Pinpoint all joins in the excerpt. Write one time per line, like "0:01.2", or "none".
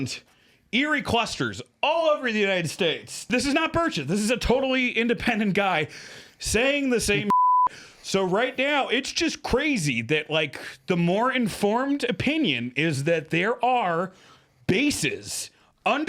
0:03.2